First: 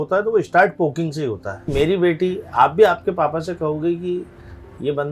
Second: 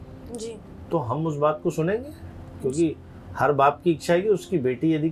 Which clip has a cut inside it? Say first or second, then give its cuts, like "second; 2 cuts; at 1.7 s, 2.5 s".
first; 1 cut; at 1.7 s